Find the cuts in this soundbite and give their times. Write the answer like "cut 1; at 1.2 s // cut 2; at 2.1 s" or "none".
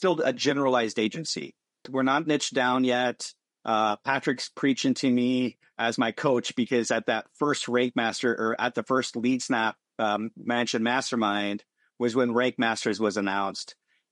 cut 1; at 1.8 s